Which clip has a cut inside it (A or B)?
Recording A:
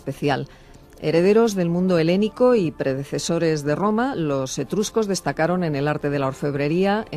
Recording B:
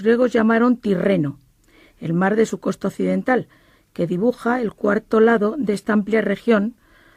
A